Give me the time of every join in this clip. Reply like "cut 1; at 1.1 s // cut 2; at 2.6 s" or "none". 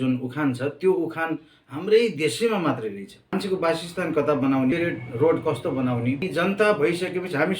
cut 1; at 3.1 s // cut 2; at 4.7 s // cut 3; at 6.3 s